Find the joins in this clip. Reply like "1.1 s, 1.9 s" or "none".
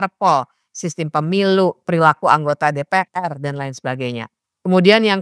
none

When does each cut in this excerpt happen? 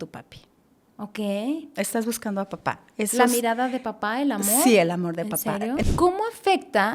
5.8 s

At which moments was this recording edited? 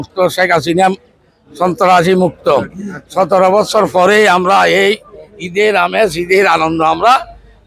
none

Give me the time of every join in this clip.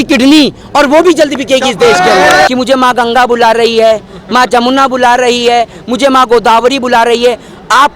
2.5 s

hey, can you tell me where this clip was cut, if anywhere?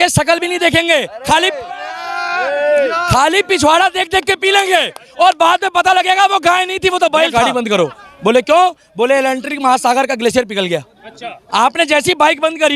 7.3 s

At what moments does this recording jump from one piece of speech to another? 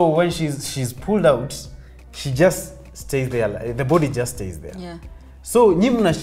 none

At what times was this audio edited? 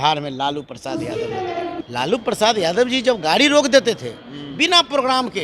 1.8 s

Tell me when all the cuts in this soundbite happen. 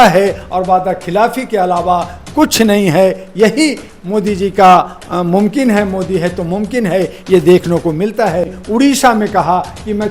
8.6 s

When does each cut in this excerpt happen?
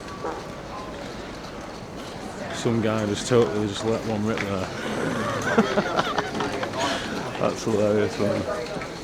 none

